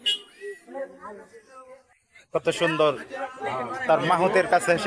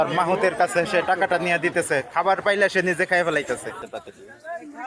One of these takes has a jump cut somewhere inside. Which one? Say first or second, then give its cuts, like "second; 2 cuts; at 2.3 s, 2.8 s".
second; 1 cut; at 3.8 s